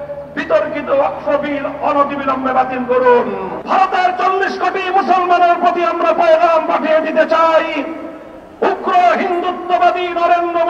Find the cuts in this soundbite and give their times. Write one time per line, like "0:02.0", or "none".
0:03.6